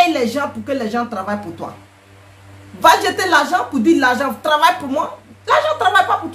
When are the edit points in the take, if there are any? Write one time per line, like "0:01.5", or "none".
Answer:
none